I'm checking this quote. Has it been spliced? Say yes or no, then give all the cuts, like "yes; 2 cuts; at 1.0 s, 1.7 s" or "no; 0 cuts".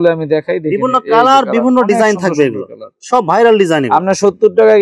no; 0 cuts